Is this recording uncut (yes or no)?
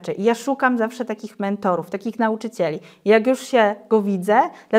yes